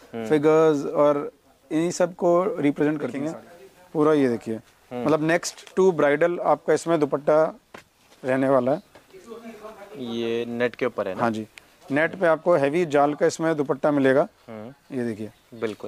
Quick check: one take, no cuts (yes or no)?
no